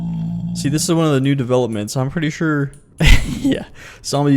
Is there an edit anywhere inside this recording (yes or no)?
yes